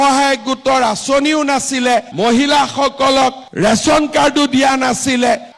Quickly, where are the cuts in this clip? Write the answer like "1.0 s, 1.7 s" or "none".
none